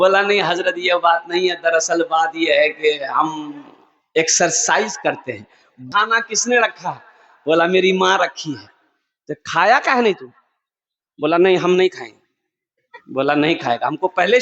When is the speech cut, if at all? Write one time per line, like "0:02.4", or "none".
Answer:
0:05.8